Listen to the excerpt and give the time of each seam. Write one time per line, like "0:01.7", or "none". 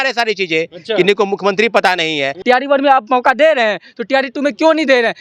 0:02.3